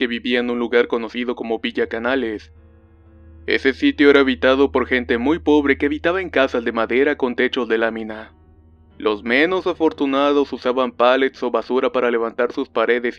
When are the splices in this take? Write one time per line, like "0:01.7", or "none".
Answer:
0:10.4